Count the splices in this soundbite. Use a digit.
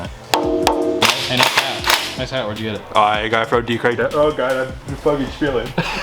1